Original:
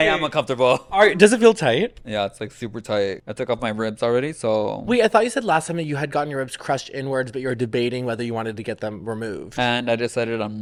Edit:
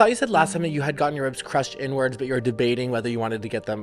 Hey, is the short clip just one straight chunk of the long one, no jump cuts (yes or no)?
yes